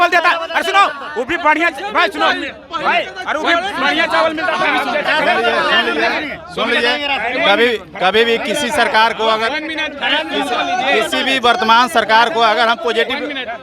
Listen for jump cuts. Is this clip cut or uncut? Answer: uncut